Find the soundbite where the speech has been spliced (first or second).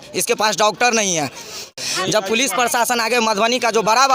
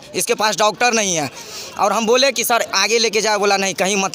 first